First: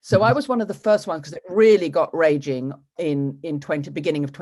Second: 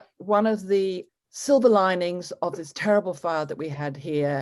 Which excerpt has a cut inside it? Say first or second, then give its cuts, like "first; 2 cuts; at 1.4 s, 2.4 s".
second; 1 cut; at 1.1 s